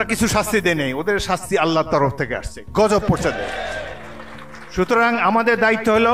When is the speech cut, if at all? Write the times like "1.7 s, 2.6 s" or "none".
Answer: none